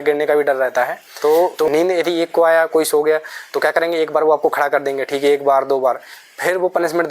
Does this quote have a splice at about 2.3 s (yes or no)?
no